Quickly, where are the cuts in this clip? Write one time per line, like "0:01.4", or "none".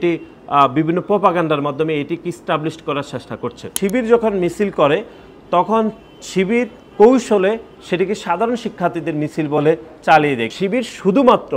0:03.6
0:10.5

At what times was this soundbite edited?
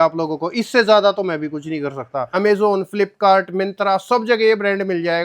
0:02.2

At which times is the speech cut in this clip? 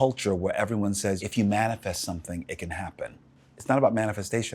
0:01.2
0:03.3

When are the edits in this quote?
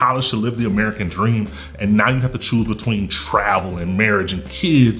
none

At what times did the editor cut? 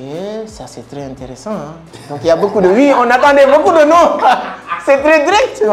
none

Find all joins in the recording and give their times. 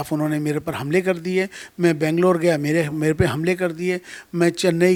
none

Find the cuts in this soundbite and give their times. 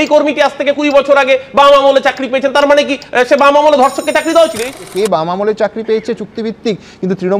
0:04.6

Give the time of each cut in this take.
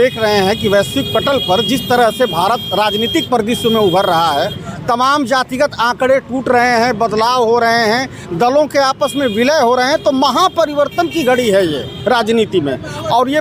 none

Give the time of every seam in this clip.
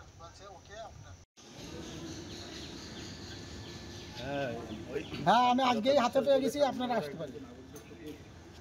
0:01.1

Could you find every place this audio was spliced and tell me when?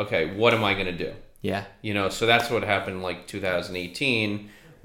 none

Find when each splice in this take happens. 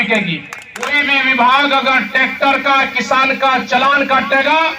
0:01.0

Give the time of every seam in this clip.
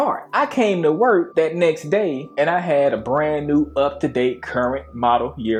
none

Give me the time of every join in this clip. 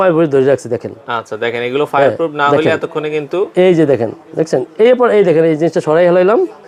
none

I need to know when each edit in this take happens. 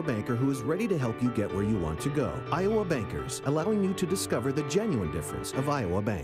none

